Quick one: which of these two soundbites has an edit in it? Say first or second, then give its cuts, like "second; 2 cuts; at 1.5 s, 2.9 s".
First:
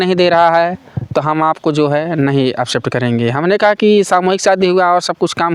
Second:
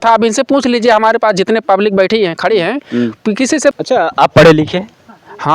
second; 1 cut; at 3.7 s